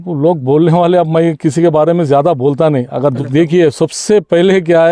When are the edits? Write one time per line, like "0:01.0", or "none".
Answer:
0:03.2

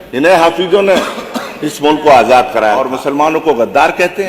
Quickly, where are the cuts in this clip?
0:02.9

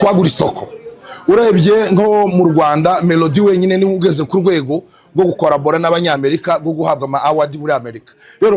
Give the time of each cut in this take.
none

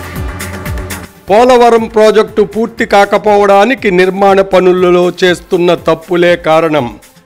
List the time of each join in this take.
0:01.0

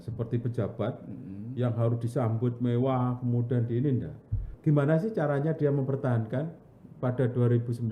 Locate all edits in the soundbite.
0:04.5

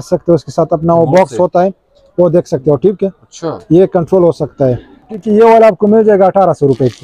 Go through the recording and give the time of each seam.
0:05.2

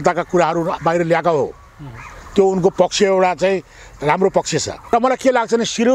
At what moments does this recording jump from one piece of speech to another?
0:04.8

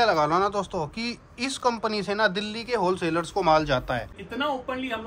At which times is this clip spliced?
0:04.1

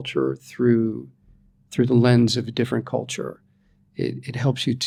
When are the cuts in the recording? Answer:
none

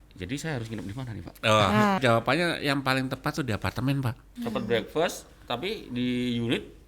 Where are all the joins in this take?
0:02.0
0:04.2

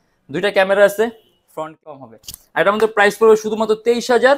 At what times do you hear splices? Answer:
0:01.9

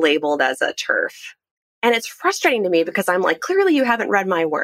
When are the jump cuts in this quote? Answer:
none

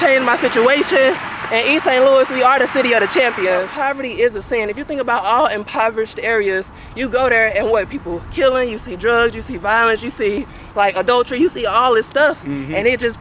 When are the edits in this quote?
0:01.3
0:03.7

